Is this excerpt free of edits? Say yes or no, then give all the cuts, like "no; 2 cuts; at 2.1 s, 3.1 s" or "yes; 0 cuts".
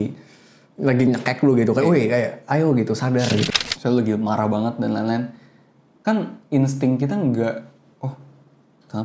no; 1 cut; at 3.4 s